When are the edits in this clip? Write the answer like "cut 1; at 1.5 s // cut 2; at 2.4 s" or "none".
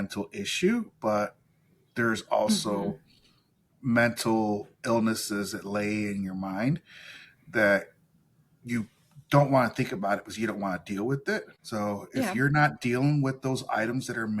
cut 1; at 11.6 s